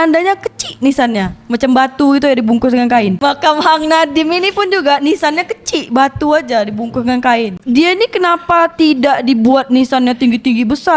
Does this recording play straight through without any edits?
no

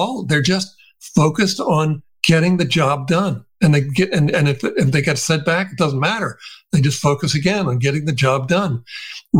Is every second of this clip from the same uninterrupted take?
yes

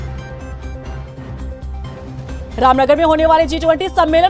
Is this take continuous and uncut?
no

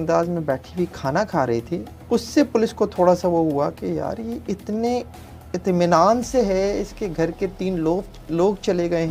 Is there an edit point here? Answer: no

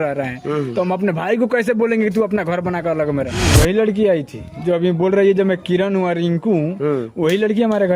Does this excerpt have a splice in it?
yes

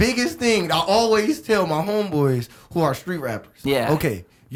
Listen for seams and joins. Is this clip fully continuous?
yes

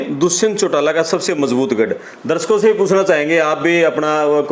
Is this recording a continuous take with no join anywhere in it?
yes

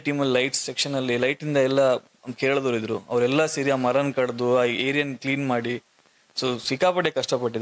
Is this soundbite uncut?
yes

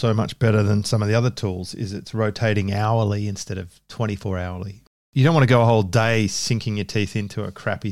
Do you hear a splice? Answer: yes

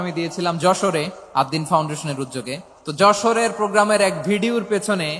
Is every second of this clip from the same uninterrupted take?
no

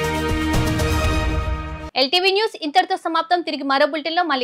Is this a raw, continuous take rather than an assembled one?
yes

